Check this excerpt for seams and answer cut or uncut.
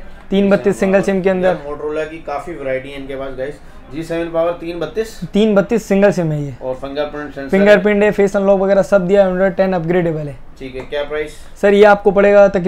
uncut